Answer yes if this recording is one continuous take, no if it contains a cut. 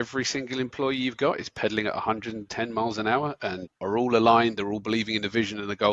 no